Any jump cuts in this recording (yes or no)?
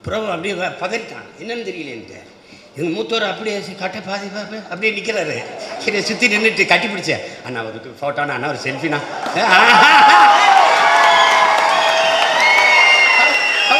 no